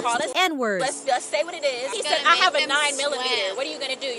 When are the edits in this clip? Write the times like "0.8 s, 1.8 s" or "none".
1.9 s